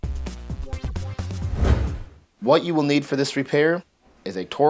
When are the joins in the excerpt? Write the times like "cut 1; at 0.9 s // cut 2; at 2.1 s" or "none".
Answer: cut 1; at 1.4 s